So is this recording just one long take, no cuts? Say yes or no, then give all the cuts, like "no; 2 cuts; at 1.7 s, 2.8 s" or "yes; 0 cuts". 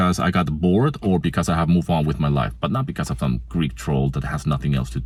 yes; 0 cuts